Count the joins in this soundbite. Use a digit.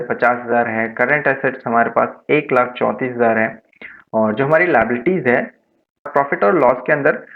1